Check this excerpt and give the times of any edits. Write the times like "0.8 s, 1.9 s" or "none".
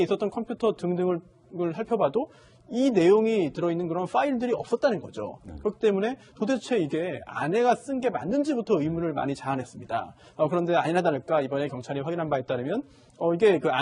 11.2 s